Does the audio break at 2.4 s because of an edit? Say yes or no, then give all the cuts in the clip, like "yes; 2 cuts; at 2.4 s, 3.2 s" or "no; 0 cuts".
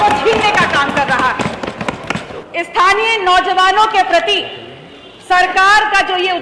yes; 1 cut; at 2.4 s